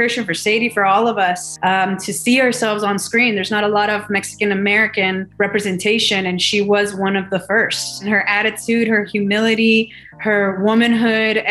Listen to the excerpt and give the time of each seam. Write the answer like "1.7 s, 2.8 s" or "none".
1.5 s, 5.3 s, 8.0 s